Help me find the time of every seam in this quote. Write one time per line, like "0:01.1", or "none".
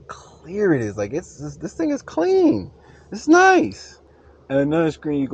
0:04.1